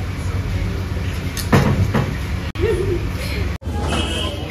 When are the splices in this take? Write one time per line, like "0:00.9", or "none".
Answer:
none